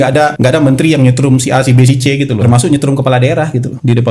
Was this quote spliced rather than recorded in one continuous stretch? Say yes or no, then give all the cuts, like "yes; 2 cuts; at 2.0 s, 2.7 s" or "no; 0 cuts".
yes; 1 cut; at 2.4 s